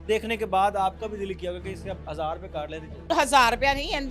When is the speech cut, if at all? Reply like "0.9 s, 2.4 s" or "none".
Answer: 3.0 s